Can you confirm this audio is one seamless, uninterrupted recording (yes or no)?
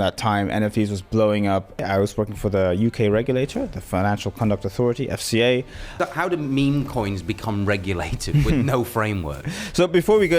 no